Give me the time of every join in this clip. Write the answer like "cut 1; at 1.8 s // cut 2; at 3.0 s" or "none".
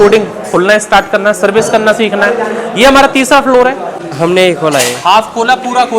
cut 1; at 4.0 s